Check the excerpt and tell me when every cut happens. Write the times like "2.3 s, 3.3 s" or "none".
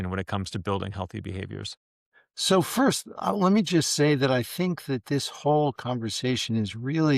2.1 s